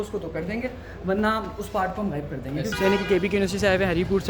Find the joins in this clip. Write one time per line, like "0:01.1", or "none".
0:02.7